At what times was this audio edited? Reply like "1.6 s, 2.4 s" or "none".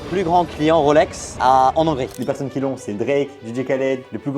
2.1 s

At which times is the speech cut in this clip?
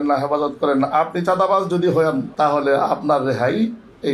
2.3 s

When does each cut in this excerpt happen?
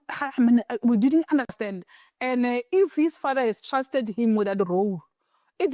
1.5 s

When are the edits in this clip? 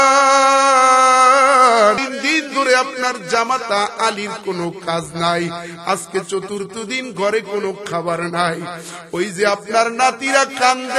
2.0 s

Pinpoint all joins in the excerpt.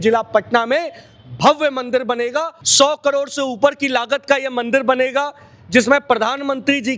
2.5 s

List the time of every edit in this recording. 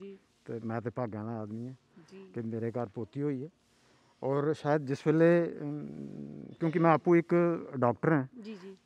none

